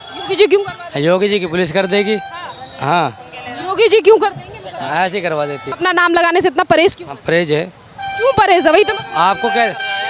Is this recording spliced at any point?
yes; 1 cut; at 5.7 s

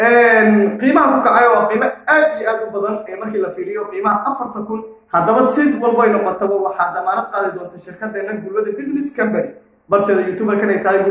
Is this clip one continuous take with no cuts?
yes; 0 cuts

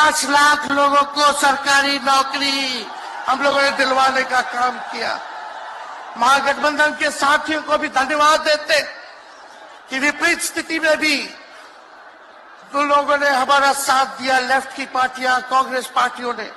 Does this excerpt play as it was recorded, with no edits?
yes; 0 cuts

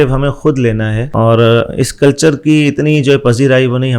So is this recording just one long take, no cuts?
no; 1 cut; at 1.0 s

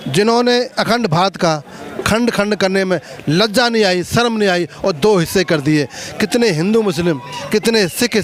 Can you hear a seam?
no; 0 cuts

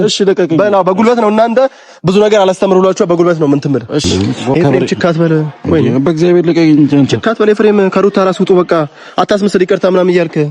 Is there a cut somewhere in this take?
yes; 1 cut; at 4.1 s

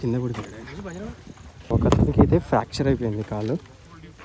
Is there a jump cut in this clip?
yes; 1 cut; at 1.7 s

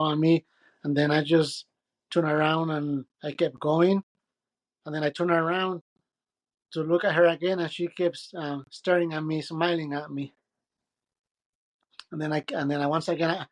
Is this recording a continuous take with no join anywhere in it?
yes; 0 cuts

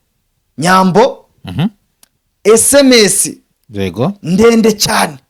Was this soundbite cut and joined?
no; 0 cuts

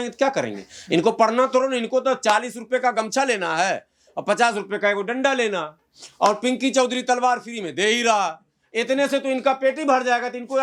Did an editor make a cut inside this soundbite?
no; 0 cuts

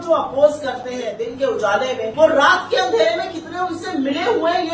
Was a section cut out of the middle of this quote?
yes; 2 cuts; at 1.1 s, 2.1 s

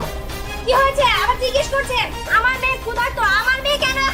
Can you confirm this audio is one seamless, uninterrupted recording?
yes; 0 cuts

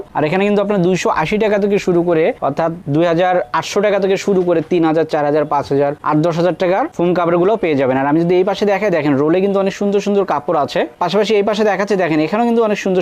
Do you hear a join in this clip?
no; 0 cuts

